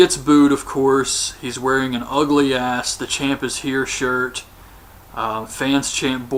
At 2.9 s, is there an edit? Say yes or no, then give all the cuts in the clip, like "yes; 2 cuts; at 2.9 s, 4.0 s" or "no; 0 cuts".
no; 0 cuts